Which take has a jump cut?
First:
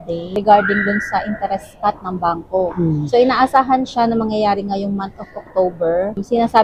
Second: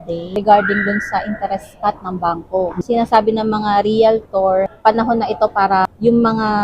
second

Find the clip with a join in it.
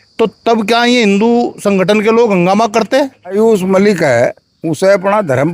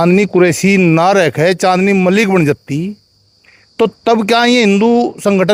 first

